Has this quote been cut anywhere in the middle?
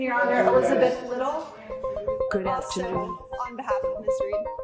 no; 0 cuts

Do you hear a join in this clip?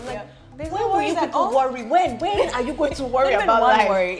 no; 0 cuts

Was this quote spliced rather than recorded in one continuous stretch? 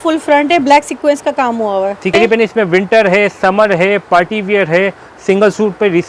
yes; 1 cut; at 2.1 s

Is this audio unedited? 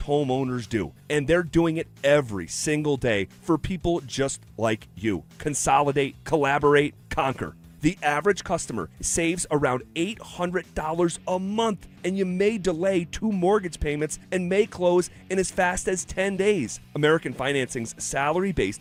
yes; 0 cuts

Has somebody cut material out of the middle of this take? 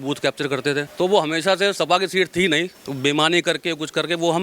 yes; 2 cuts; at 0.9 s, 2.8 s

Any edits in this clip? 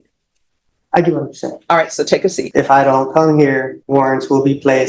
yes; 2 cuts; at 2.4 s, 3.7 s

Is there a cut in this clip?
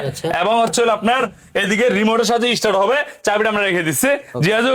no; 0 cuts

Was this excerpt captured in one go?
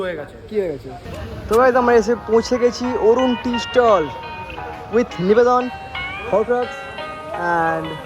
no; 1 cut; at 1.1 s

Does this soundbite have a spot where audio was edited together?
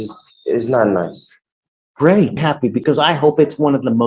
yes; 1 cut; at 2.5 s

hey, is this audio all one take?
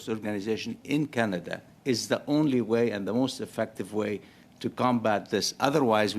yes; 0 cuts

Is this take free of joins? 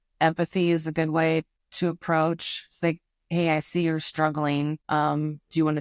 no; 2 cuts; at 1.6 s, 4.8 s

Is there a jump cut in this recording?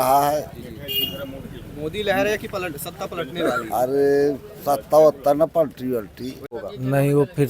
yes; 1 cut; at 6.4 s

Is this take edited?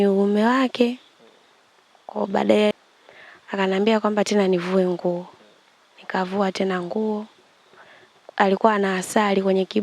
yes; 1 cut; at 2.7 s

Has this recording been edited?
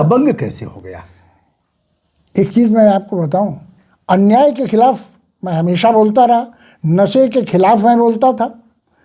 no; 0 cuts

